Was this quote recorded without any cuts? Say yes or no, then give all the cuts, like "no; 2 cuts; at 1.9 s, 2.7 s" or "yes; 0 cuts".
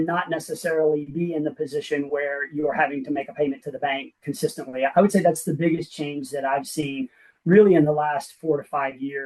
yes; 0 cuts